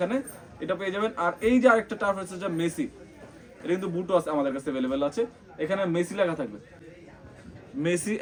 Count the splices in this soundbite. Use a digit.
0